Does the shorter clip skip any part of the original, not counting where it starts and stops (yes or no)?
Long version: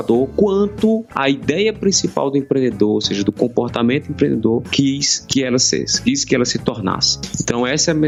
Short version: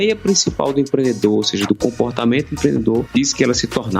yes